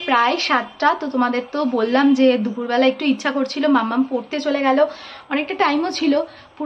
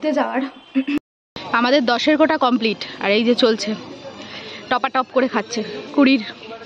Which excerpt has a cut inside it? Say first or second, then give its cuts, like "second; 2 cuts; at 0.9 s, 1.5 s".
second; 1 cut; at 1.0 s